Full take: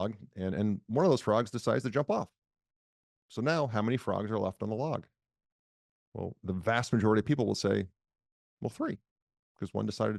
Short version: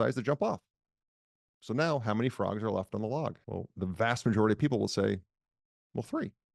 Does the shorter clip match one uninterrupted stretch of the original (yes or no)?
no